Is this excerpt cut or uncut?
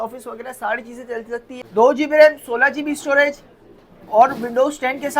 cut